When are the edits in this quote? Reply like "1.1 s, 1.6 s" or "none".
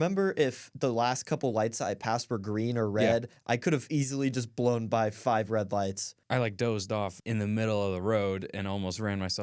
6.1 s, 7.2 s